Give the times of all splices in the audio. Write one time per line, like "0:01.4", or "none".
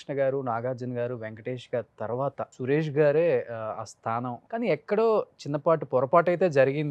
0:02.5
0:04.4

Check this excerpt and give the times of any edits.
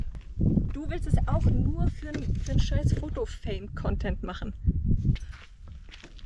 0:05.2

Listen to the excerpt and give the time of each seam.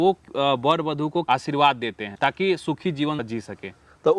0:02.0
0:03.3

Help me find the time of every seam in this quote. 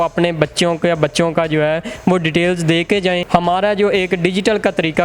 0:03.2

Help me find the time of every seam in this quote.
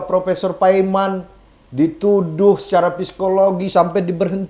none

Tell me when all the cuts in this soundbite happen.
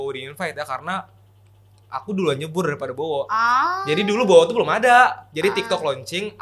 none

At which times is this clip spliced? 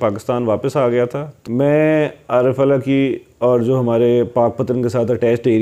0:01.3

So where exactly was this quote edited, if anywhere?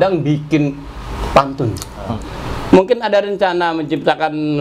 0:01.9

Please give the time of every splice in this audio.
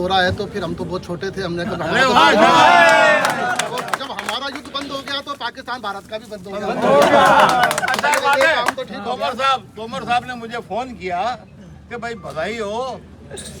none

